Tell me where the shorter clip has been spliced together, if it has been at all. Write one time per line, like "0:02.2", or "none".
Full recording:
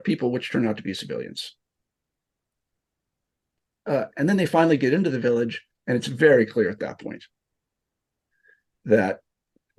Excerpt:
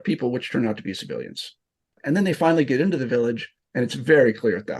0:02.0

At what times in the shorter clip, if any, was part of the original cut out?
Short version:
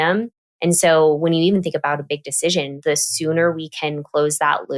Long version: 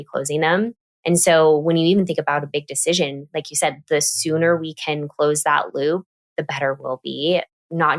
0:02.8

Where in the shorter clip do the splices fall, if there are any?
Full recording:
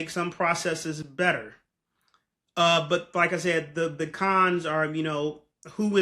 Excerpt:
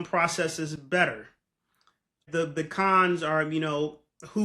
0:02.2

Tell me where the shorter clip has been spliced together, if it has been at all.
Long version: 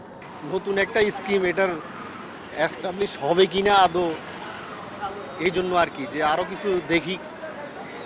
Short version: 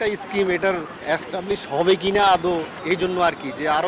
0:00.9
0:02.8

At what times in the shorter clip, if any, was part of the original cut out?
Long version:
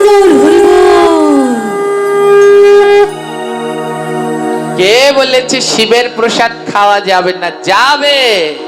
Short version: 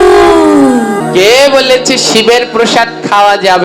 0:01.0

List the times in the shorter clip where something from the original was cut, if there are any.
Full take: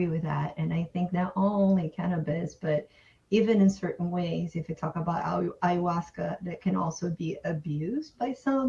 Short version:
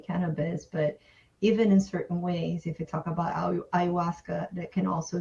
none

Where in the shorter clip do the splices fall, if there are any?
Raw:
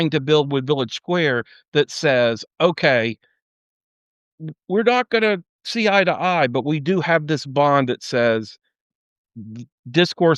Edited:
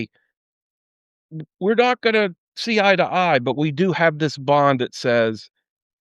none

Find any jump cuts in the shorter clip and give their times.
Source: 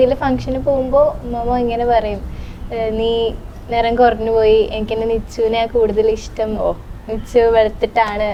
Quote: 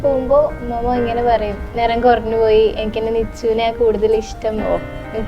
0:01.6

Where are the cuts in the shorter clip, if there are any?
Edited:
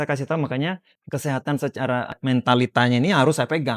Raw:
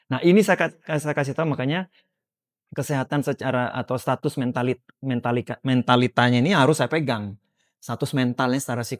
0:00.9
0:02.1

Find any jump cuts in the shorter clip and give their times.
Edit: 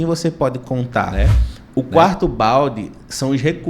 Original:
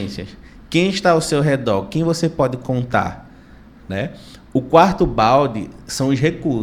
0:01.1

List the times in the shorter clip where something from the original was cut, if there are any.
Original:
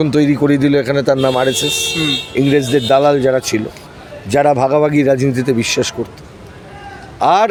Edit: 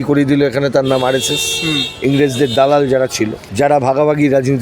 0:03.4

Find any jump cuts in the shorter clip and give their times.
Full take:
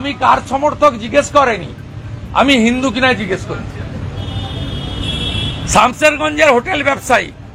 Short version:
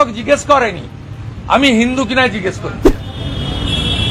0:03.0

